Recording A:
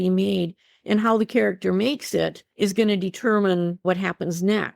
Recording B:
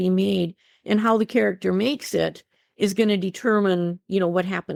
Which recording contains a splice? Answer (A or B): A